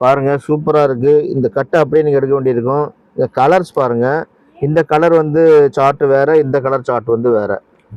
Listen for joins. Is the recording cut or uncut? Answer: uncut